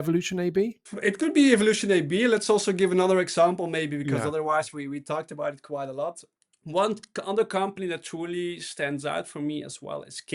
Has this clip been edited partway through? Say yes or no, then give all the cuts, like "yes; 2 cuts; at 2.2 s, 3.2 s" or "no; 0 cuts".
yes; 2 cuts; at 0.9 s, 6.3 s